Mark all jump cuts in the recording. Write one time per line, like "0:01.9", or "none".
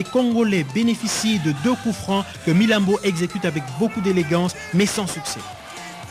0:01.7